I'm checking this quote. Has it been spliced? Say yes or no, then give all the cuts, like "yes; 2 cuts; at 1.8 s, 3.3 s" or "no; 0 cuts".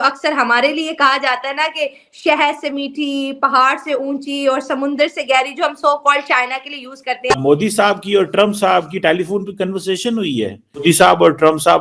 yes; 2 cuts; at 7.4 s, 10.8 s